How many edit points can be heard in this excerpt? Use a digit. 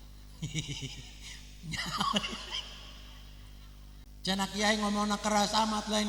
1